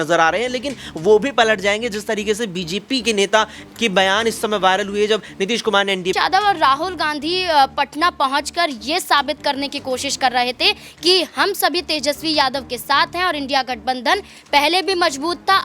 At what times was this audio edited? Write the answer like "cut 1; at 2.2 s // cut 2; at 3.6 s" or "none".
cut 1; at 6.1 s